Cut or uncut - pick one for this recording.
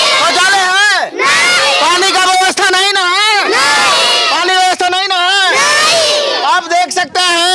uncut